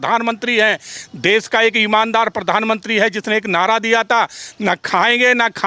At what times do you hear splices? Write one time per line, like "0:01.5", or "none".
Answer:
none